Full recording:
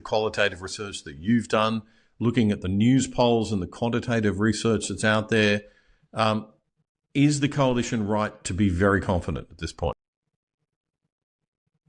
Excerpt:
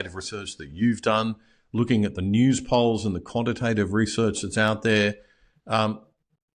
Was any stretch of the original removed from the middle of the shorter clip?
no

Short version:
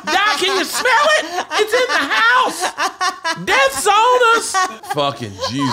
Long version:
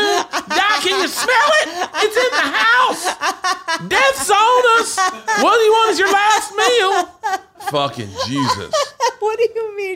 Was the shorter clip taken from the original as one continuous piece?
no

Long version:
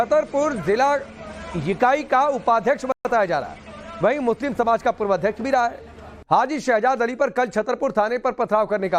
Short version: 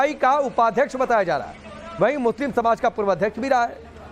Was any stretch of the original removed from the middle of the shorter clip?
yes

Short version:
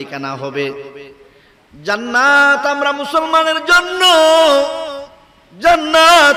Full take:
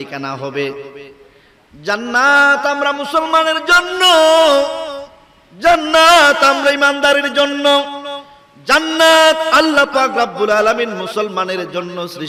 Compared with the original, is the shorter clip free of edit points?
yes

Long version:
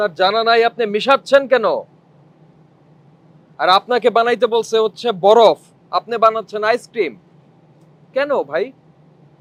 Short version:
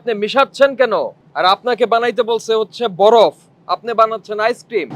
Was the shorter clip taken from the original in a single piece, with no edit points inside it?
no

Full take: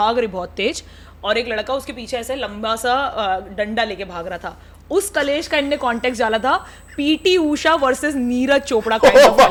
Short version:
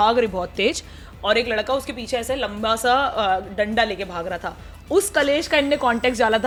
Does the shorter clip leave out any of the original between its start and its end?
no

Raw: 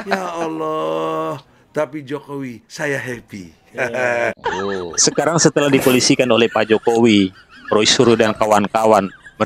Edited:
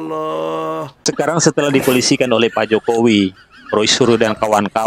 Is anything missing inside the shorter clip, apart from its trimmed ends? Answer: yes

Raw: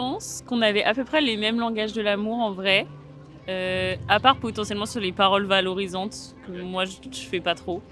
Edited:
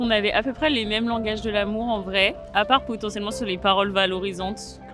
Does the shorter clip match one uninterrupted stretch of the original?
no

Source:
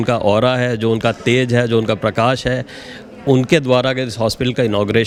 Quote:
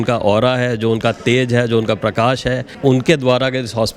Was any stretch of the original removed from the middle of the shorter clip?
yes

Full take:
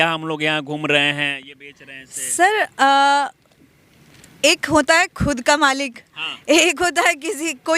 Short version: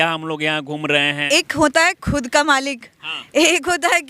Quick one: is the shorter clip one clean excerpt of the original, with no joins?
no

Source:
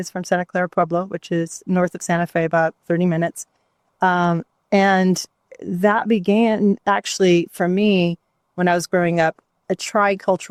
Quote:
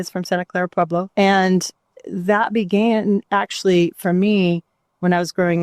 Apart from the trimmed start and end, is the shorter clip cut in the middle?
yes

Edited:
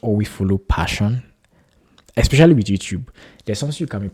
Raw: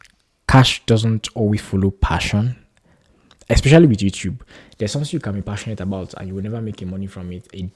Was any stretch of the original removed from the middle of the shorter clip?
no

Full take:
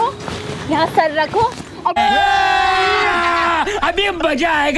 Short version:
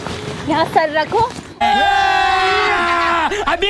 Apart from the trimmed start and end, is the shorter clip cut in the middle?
yes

